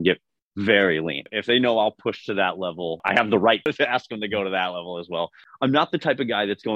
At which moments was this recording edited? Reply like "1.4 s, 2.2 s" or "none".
1.2 s, 3.0 s, 3.7 s, 5.4 s